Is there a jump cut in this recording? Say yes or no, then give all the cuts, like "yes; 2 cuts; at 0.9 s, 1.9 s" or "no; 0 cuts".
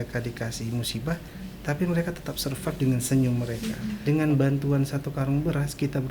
yes; 1 cut; at 4.0 s